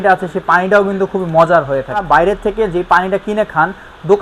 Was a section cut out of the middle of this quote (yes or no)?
yes